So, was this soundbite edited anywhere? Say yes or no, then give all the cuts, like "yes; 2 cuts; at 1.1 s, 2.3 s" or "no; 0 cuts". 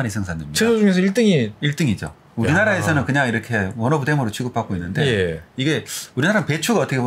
no; 0 cuts